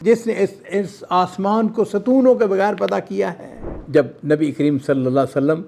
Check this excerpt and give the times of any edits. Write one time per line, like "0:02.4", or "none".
0:03.7